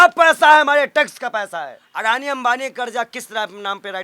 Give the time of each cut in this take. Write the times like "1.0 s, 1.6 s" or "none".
1.8 s